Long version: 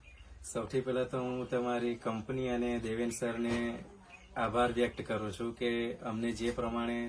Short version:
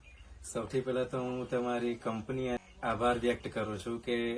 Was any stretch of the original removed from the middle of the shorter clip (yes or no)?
yes